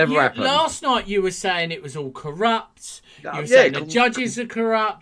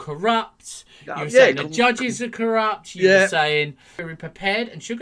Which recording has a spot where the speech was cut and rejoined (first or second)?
second